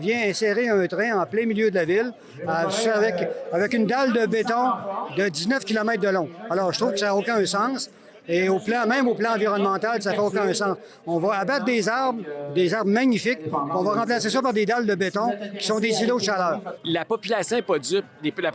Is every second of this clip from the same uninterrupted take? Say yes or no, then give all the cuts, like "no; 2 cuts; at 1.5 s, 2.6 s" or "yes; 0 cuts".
no; 1 cut; at 16.7 s